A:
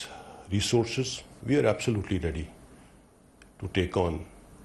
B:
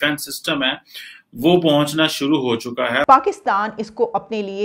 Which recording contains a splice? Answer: B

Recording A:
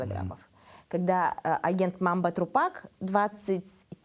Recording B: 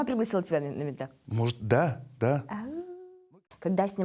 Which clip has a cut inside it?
B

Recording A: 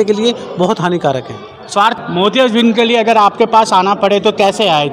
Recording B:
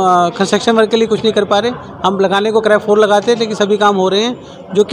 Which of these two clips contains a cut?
A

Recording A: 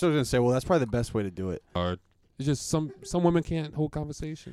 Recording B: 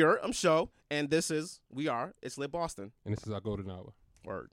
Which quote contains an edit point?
A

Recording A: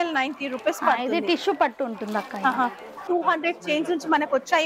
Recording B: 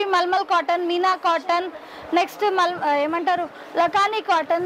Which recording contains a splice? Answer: A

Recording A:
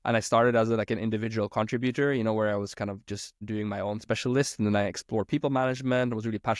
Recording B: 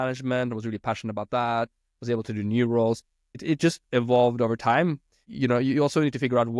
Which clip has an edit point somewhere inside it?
B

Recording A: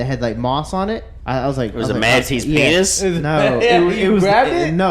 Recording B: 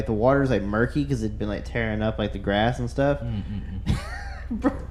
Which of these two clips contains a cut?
A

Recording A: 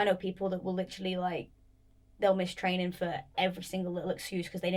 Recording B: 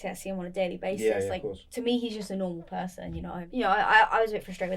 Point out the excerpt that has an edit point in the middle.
B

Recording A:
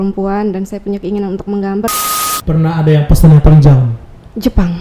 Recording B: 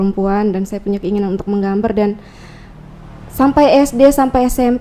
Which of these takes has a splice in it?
A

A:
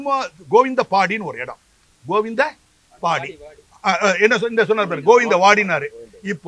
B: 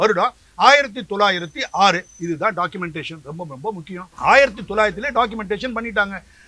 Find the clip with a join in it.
B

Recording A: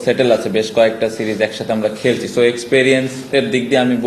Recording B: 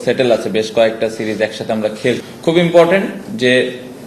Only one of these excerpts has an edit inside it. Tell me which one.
B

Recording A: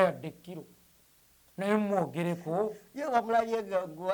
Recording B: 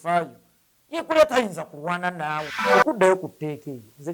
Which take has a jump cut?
B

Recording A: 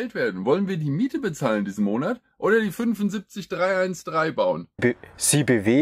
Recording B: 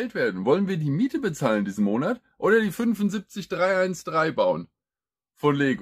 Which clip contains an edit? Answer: A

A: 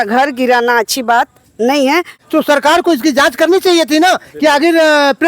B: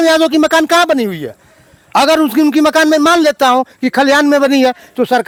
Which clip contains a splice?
A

